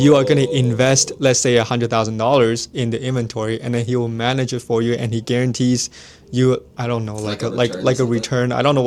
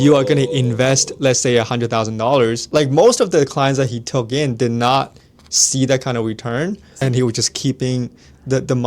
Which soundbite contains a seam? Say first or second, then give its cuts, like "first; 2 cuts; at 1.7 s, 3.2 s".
second; 2 cuts; at 2.6 s, 6.9 s